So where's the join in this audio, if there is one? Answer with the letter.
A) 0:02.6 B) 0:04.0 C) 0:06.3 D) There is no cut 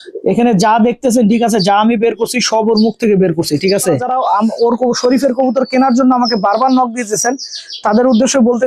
B